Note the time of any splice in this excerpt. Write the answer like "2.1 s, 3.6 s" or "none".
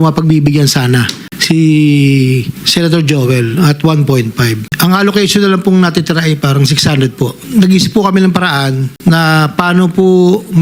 7.4 s

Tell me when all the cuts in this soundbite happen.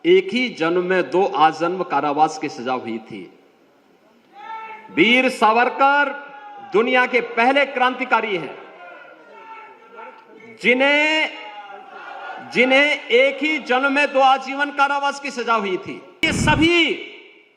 16.3 s

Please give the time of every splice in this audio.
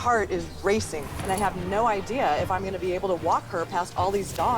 1.1 s

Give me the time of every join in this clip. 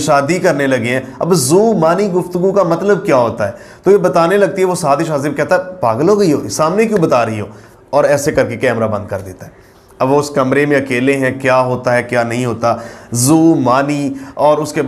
none

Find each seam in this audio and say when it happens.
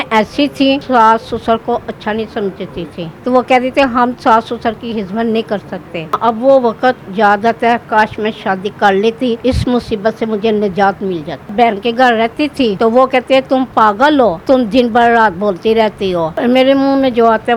0.8 s, 3.1 s, 6.2 s, 9.4 s, 11.5 s, 12.7 s, 14.4 s, 16.4 s

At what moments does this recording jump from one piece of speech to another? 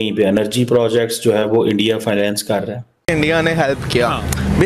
3.1 s

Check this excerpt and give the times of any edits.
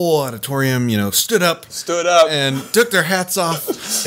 none

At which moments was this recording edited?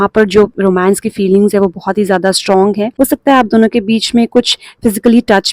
2.9 s

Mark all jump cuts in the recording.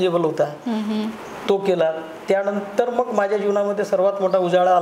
none

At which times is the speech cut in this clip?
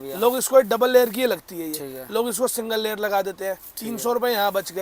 none

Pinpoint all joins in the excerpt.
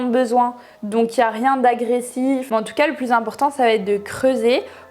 2.4 s

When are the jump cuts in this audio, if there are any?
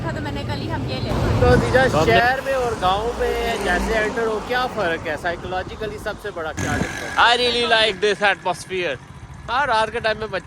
1.1 s, 6.6 s

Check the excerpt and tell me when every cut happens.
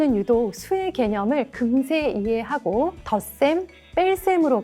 3.0 s

